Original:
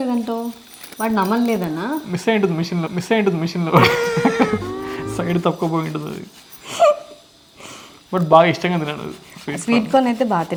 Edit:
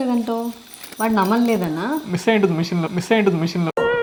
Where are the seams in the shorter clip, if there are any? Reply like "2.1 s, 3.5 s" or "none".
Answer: none